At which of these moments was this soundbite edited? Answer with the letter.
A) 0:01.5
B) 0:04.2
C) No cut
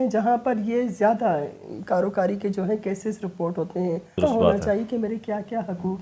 B